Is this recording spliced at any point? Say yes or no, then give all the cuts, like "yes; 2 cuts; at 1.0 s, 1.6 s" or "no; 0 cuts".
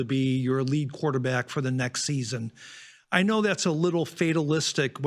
no; 0 cuts